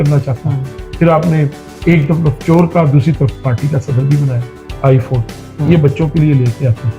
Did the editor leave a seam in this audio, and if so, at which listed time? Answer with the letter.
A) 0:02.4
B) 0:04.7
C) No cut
B